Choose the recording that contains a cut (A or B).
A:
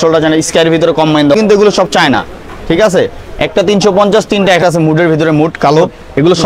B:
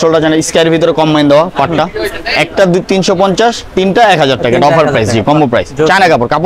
A